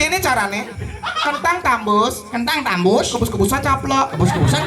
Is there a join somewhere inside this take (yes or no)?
no